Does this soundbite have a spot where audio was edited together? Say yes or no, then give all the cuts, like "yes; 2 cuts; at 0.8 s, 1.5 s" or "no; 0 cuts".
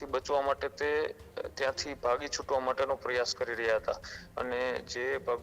no; 0 cuts